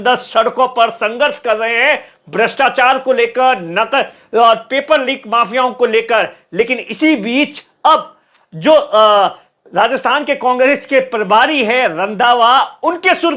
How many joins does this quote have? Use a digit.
0